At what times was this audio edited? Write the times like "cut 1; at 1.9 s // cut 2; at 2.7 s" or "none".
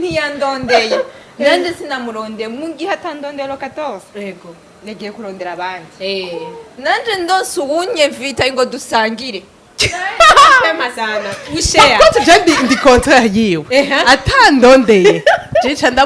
none